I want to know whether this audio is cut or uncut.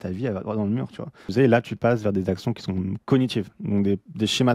cut